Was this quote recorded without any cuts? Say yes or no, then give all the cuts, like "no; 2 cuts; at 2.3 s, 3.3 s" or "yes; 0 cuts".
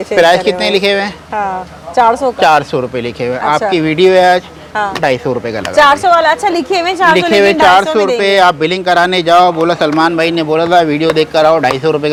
yes; 0 cuts